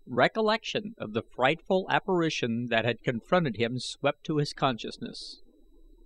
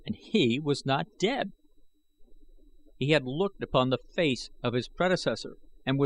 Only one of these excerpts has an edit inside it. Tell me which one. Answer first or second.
second